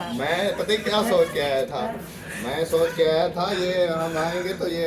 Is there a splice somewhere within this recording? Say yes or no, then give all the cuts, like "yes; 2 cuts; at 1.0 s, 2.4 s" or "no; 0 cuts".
yes; 1 cut; at 1.9 s